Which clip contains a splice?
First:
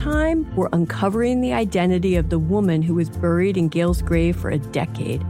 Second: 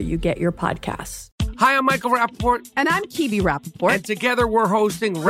second; 1 cut; at 1.2 s

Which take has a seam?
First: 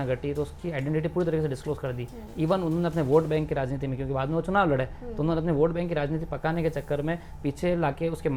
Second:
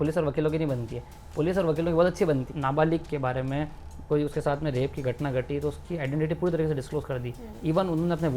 second; 1 cut; at 2.5 s

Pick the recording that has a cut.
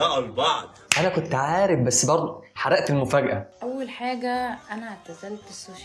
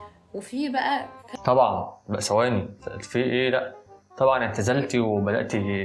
first; 1 cut; at 3.5 s

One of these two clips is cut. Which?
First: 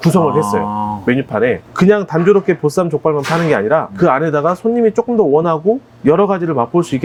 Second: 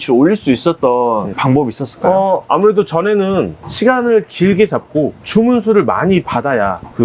second; 1 cut; at 1.3 s

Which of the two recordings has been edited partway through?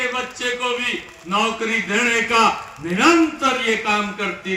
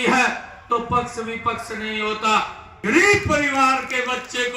second; 1 cut; at 2.7 s

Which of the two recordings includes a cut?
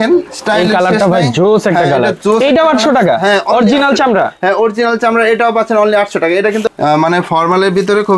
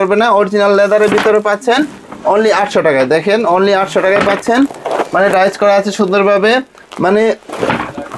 first; 1 cut; at 6.6 s

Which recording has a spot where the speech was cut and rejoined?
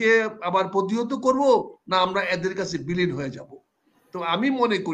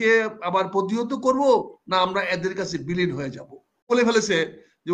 second; 1 cut; at 3.9 s

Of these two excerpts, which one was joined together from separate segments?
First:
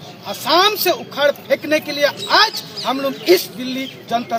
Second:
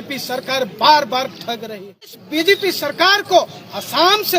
second; 1 cut; at 2.2 s

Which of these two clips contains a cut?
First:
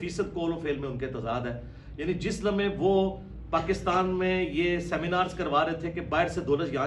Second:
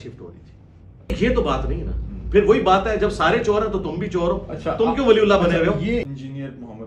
second; 2 cuts; at 1.1 s, 6.1 s

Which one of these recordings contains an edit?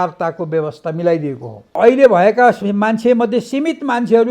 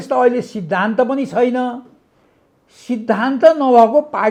first; 1 cut; at 1.7 s

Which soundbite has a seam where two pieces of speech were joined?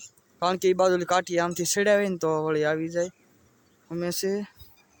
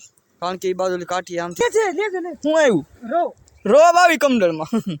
second; 1 cut; at 1.6 s

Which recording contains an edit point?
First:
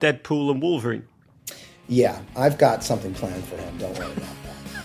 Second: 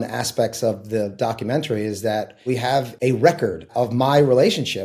second; 2 cuts; at 2.6 s, 3.7 s

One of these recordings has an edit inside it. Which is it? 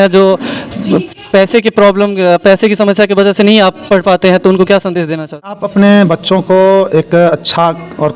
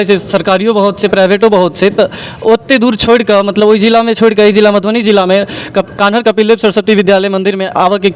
first; 1 cut; at 5.5 s

